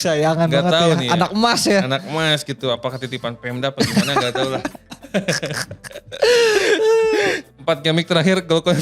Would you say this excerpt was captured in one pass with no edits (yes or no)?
no